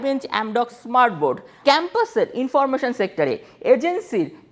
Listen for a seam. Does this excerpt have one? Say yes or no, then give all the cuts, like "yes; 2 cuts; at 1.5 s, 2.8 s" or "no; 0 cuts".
yes; 1 cut; at 1.6 s